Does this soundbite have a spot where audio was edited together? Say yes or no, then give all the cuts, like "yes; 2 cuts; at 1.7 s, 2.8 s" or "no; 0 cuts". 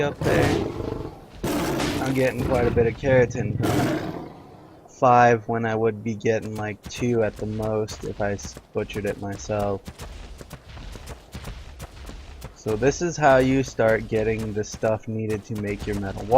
yes; 1 cut; at 1.9 s